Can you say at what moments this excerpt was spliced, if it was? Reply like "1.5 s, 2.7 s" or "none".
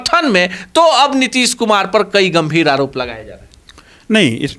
none